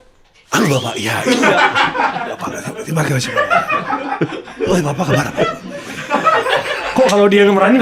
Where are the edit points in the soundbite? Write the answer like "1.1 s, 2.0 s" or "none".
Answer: none